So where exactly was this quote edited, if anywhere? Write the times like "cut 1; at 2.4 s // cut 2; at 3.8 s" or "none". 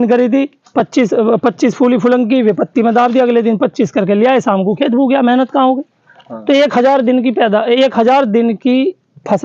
cut 1; at 6.2 s